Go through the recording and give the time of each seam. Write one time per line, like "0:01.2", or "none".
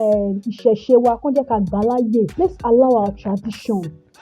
0:02.3